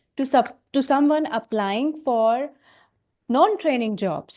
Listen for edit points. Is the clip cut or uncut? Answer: uncut